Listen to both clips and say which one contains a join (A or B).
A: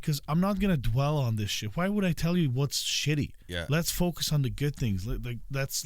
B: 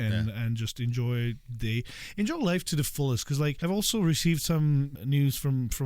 B